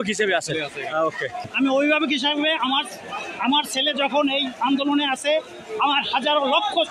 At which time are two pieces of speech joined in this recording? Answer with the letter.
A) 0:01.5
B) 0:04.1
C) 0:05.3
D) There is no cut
A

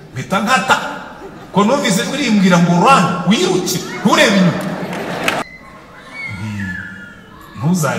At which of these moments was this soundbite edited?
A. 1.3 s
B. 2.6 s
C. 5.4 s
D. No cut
C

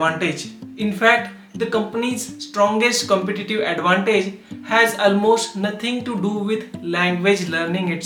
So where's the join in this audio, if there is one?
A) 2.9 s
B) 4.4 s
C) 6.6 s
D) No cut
D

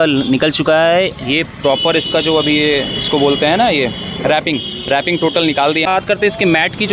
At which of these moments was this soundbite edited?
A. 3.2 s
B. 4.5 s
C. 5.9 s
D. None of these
C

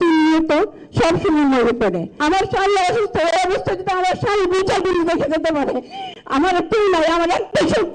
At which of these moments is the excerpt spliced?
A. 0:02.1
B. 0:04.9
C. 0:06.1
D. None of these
A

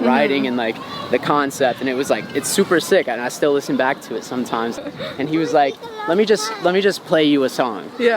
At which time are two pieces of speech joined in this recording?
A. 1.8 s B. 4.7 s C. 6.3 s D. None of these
B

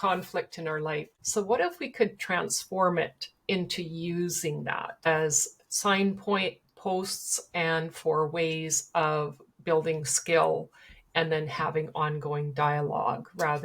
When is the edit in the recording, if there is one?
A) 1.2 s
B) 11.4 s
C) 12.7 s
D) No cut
A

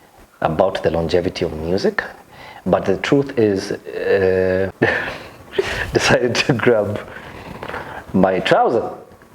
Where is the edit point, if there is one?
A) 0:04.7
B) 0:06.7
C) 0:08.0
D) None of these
A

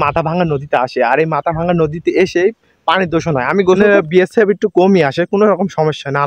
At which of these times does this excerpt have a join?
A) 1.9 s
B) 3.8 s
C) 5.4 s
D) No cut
B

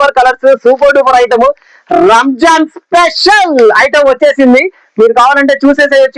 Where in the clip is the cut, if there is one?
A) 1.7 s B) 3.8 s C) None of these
C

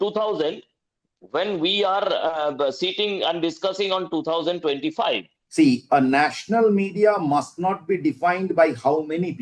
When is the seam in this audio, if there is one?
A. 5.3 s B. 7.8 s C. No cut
A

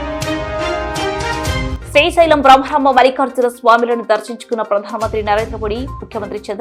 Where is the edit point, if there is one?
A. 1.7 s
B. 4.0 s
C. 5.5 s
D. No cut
D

